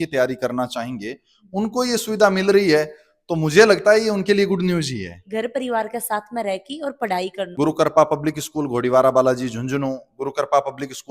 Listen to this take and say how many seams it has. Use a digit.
2